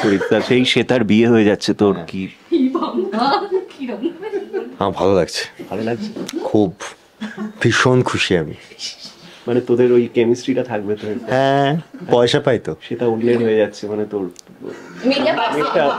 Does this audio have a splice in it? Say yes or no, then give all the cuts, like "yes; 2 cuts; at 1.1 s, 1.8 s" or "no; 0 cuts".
no; 0 cuts